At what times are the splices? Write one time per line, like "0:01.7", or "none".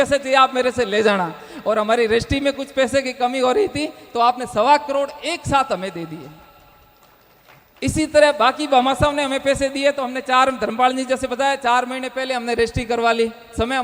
none